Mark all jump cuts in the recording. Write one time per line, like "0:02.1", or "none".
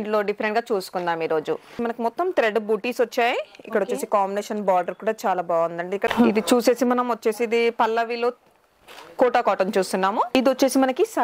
0:01.8
0:06.1
0:10.3